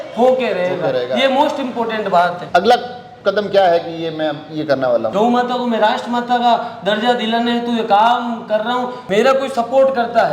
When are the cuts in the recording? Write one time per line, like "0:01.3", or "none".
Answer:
0:02.4
0:05.1
0:09.0